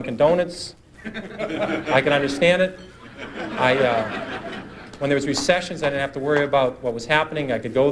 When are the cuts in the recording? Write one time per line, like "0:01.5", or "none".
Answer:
none